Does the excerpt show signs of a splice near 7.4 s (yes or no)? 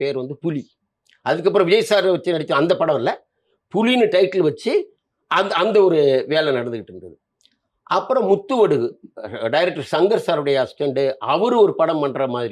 no